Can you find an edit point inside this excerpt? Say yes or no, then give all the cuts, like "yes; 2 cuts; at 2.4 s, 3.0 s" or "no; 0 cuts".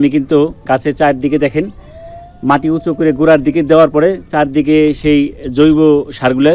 no; 0 cuts